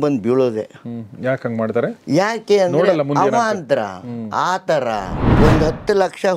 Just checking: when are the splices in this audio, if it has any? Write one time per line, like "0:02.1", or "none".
0:05.2